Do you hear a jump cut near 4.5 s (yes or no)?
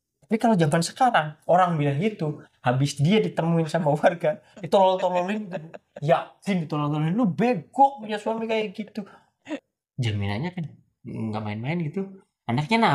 no